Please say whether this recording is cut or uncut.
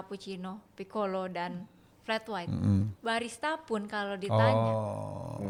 uncut